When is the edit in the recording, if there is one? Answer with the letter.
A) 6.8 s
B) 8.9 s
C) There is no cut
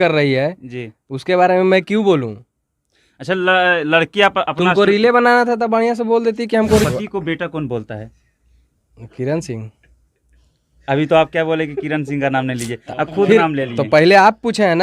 A